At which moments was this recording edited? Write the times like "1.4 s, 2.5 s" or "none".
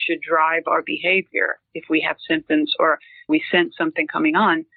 3.3 s